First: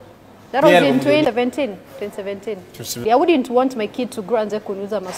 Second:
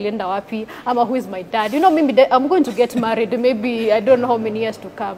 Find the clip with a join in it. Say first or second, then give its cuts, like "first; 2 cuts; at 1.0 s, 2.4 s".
first; 2 cuts; at 1.2 s, 3.0 s